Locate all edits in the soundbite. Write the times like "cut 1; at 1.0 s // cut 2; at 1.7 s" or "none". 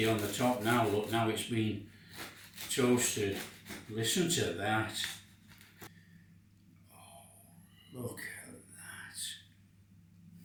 none